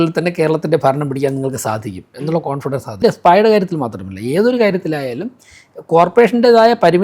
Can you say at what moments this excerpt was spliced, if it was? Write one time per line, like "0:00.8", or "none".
0:03.0